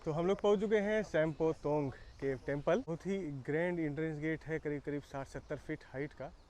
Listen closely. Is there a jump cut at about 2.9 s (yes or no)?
yes